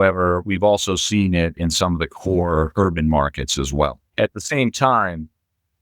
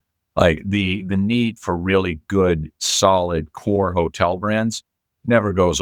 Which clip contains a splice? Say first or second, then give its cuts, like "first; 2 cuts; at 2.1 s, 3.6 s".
first; 1 cut; at 4.0 s